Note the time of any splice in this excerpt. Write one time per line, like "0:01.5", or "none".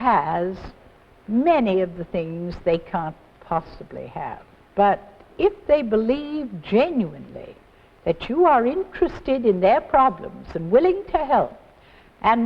0:04.5